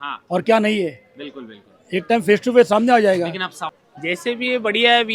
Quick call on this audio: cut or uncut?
cut